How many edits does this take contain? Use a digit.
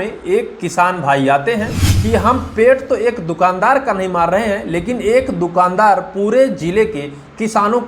1